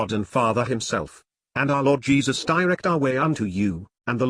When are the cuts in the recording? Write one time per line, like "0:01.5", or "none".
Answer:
0:02.8